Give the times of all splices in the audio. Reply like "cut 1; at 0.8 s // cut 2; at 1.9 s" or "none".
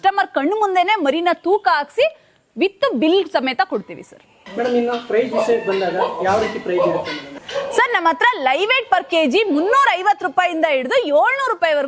none